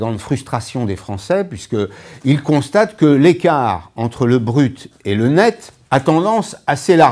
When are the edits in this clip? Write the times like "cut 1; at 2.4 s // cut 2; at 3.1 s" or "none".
none

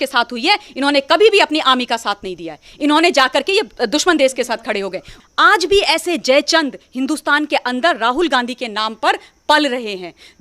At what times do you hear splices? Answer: cut 1; at 5.1 s

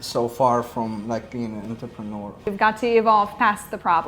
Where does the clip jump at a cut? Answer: cut 1; at 2.5 s

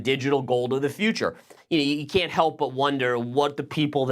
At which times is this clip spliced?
cut 1; at 1.5 s

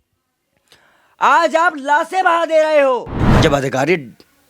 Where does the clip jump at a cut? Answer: cut 1; at 3.2 s

